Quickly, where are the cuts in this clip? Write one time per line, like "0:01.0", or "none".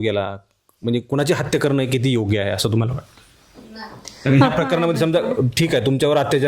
none